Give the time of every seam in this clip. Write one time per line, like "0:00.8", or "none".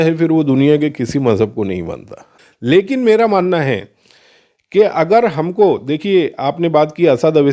0:02.3